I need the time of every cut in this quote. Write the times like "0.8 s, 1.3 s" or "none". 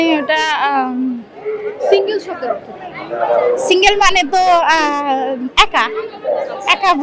none